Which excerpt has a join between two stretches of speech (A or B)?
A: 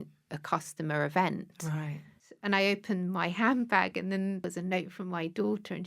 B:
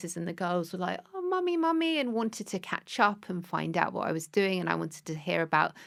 A